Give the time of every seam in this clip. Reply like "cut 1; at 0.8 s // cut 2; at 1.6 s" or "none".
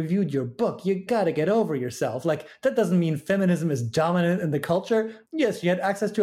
cut 1; at 1.0 s // cut 2; at 5.2 s